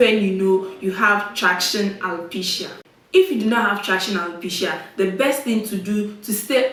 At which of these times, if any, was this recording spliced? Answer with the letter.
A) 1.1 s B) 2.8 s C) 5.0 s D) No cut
D